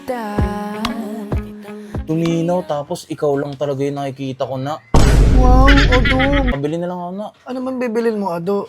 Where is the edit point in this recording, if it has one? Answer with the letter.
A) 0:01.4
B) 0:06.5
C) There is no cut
B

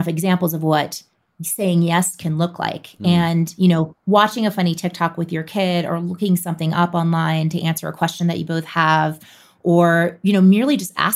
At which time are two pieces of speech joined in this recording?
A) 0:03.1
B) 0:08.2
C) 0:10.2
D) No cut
D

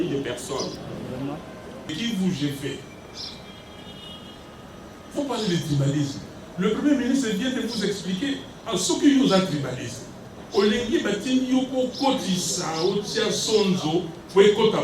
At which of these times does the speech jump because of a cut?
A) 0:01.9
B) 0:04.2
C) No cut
A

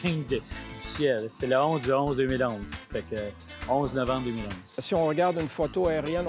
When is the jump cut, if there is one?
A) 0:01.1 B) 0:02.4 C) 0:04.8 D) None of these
C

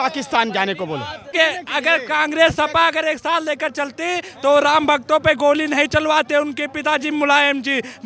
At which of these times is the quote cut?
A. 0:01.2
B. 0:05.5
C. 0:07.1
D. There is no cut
A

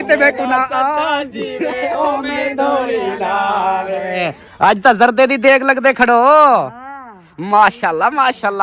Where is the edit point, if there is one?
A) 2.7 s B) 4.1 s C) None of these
B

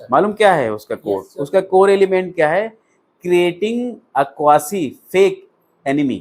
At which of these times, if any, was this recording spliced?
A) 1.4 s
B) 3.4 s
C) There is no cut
C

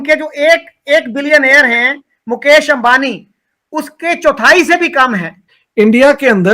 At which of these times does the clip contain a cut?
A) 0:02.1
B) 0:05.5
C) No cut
B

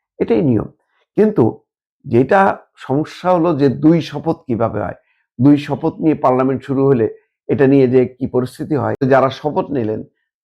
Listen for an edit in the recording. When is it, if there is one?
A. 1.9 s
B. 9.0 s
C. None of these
B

